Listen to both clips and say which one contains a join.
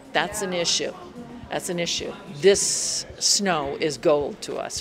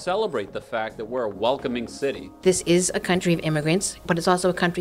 second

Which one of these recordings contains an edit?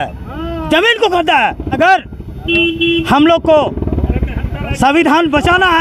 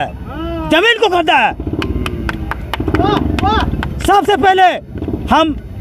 first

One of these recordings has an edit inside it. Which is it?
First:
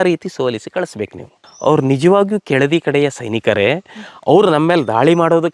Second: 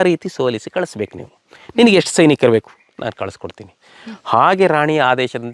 first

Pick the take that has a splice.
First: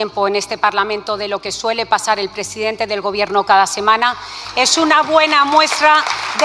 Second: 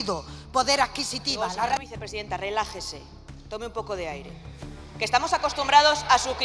second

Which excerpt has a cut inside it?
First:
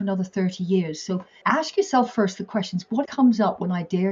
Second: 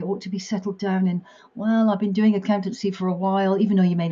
first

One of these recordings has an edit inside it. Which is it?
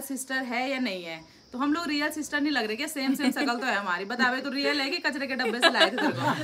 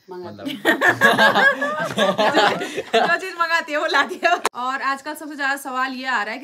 second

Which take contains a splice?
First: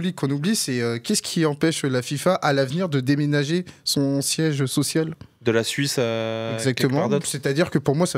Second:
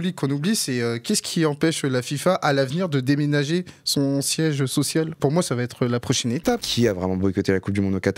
second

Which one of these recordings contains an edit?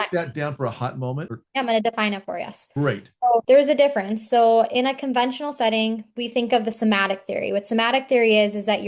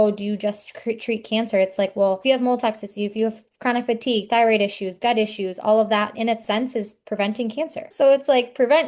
second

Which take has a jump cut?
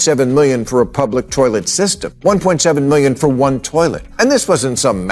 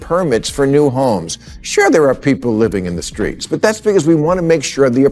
first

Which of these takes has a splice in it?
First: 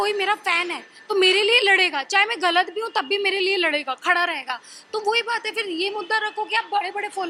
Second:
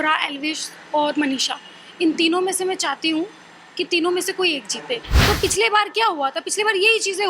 second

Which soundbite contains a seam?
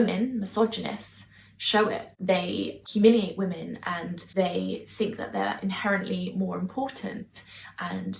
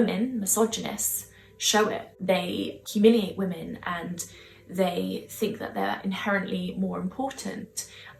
first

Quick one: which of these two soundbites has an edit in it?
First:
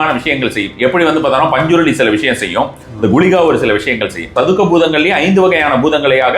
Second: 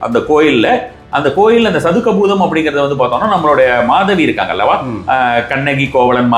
first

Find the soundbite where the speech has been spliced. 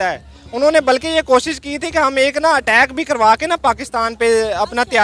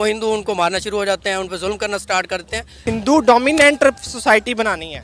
second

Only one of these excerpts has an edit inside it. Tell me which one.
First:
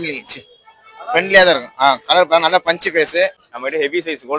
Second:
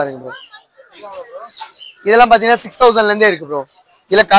first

